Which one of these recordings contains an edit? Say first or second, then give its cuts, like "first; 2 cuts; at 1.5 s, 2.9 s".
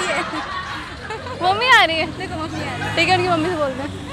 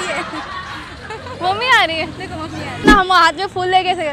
second; 1 cut; at 2.8 s